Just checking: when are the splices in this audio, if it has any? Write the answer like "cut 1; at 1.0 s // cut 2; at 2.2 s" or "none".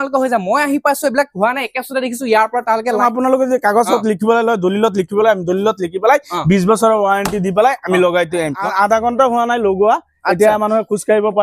cut 1; at 2.9 s // cut 2; at 8.6 s